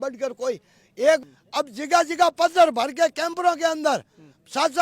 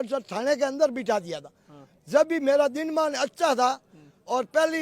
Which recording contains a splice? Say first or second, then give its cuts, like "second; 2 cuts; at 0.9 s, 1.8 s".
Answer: first; 1 cut; at 1.2 s